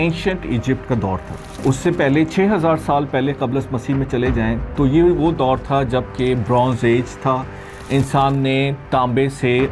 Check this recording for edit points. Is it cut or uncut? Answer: uncut